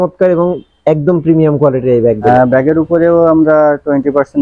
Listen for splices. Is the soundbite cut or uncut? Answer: cut